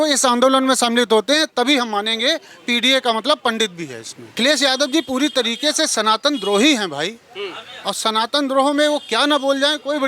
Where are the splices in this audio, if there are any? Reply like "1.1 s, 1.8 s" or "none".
4.4 s

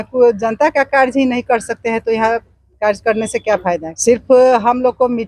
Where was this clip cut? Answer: 3.9 s

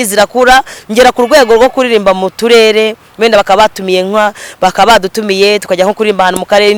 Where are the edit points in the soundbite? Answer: none

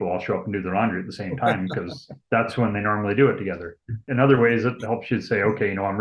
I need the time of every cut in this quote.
none

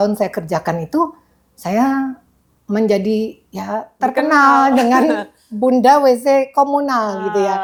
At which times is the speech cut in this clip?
none

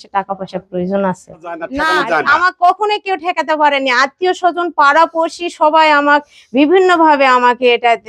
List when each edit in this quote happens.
1.7 s

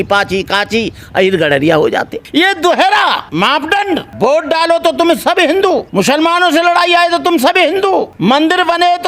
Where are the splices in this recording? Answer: 2.2 s, 3.5 s, 5.9 s, 8.1 s

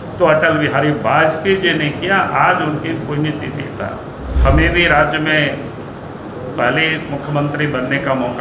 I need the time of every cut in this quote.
4.3 s

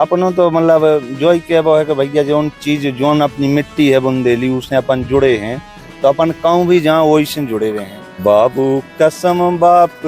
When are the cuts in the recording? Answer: 8.2 s

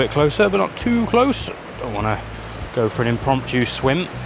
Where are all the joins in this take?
none

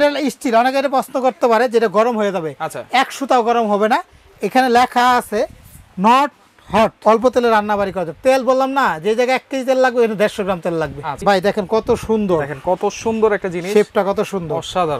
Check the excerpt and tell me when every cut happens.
7.0 s, 11.1 s

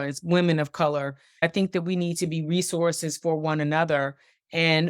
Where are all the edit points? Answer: 1.4 s

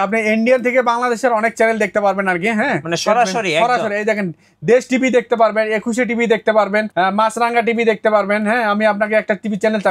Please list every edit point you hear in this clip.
6.9 s

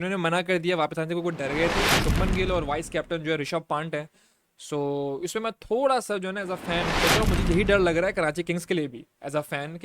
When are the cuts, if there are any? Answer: 2.1 s, 7.0 s

